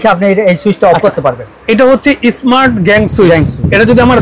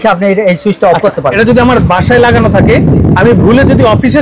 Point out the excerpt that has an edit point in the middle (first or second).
second